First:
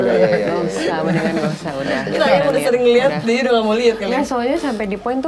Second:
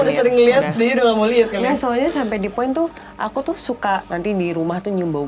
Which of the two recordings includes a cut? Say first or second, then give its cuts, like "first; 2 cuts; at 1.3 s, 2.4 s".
second; 1 cut; at 4.0 s